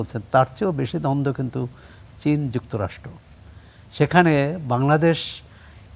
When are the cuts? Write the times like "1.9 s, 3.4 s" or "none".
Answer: none